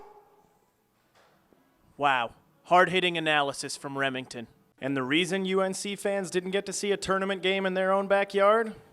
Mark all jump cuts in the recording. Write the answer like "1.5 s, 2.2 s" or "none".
4.7 s